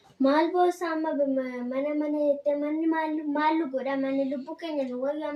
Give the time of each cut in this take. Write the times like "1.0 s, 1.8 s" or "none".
none